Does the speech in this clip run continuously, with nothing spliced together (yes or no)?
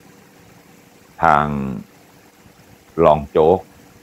yes